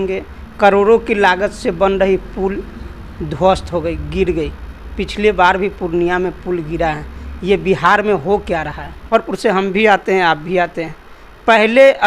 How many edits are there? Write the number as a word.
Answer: one